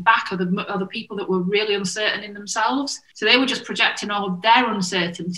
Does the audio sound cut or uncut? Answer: cut